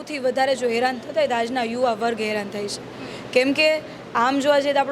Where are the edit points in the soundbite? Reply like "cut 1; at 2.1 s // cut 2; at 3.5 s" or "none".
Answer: none